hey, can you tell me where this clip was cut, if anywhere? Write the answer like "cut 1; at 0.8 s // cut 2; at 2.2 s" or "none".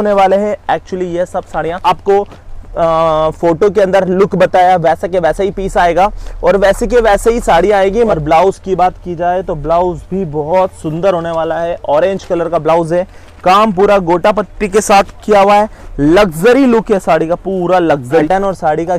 cut 1; at 1.8 s // cut 2; at 8.1 s // cut 3; at 18.1 s